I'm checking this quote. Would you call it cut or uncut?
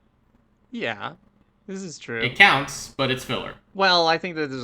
cut